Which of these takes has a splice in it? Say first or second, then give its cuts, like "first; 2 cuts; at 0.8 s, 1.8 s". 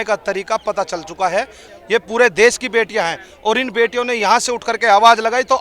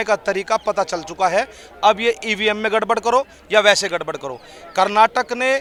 first; 1 cut; at 1.6 s